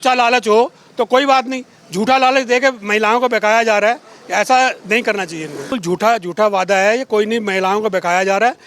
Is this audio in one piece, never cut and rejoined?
no; 1 cut; at 5.7 s

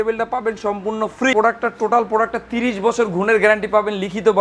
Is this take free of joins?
no; 1 cut; at 1.3 s

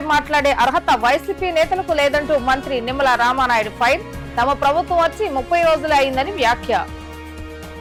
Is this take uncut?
yes; 0 cuts

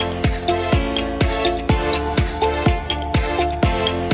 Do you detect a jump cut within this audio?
no; 0 cuts

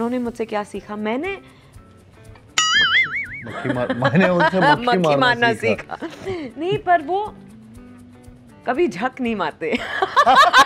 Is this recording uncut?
yes; 0 cuts

